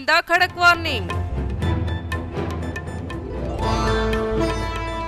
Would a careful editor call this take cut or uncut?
cut